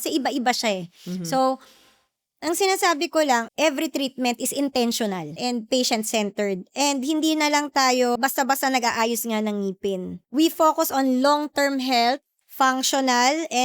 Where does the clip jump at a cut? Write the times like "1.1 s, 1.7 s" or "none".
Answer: 3.5 s, 5.3 s, 8.2 s, 10.2 s, 12.4 s